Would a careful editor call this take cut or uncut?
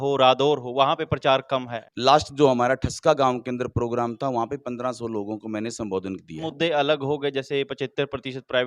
cut